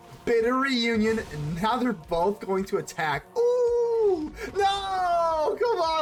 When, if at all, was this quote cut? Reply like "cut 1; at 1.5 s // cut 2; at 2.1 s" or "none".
none

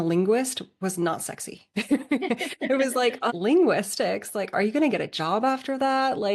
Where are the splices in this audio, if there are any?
cut 1; at 3.3 s

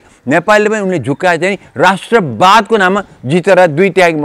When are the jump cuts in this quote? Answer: none

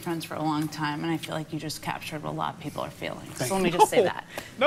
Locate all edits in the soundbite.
none

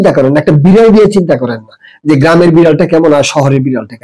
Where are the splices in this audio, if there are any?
none

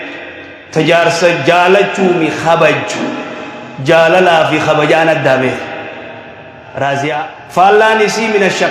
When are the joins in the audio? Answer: cut 1; at 7.6 s

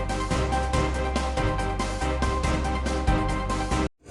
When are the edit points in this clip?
cut 1; at 2.2 s

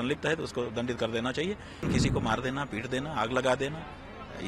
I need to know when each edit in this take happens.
cut 1; at 1.9 s

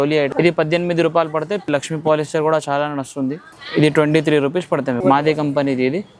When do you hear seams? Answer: cut 1; at 1.6 s // cut 2; at 5.0 s

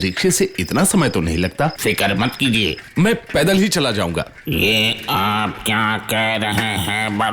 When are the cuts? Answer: cut 1; at 1.8 s // cut 2; at 2.8 s

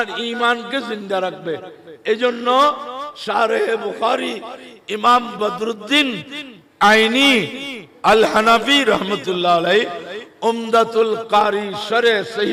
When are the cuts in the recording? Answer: none

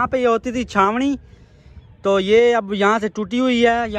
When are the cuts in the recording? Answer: none

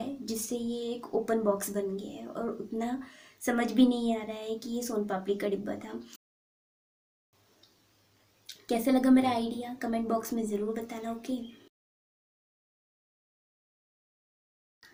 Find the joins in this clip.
none

